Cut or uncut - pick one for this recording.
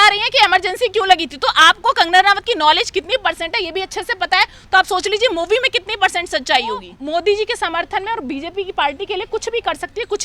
cut